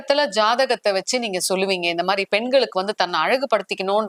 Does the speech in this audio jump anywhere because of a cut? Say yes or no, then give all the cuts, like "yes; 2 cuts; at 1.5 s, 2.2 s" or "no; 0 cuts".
no; 0 cuts